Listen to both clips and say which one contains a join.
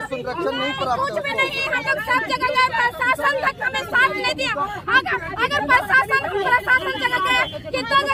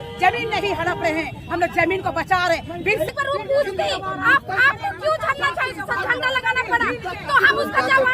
second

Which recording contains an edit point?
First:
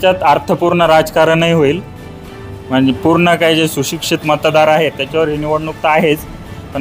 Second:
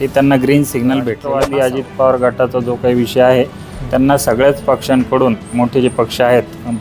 second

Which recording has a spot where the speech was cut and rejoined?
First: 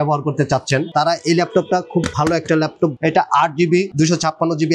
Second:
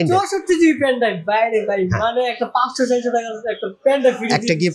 first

